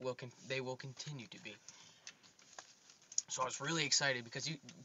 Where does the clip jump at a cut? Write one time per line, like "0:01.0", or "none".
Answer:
0:01.0